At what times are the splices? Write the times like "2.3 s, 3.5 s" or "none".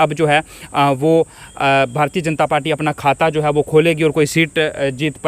none